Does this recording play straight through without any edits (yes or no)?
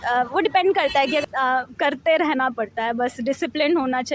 no